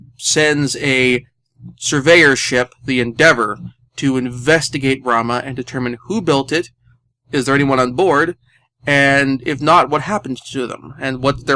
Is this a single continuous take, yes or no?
yes